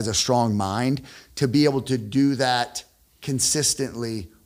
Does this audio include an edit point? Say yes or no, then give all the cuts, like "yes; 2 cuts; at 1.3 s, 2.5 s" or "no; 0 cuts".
no; 0 cuts